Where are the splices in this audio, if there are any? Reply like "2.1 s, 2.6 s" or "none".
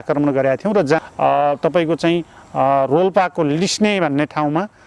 1.0 s